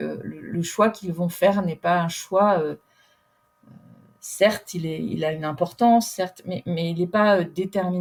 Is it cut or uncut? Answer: uncut